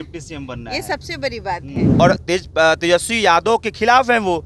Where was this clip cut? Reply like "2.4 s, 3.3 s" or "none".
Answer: 1.8 s